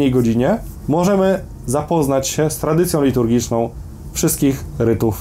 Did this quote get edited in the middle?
no; 0 cuts

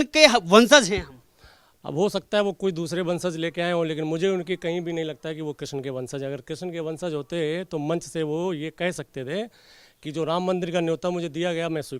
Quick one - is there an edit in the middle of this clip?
no; 0 cuts

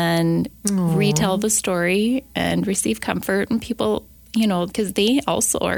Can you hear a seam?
yes; 1 cut; at 4.7 s

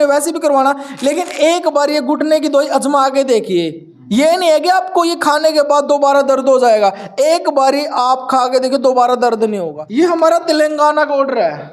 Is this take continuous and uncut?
no; 1 cut; at 9.7 s

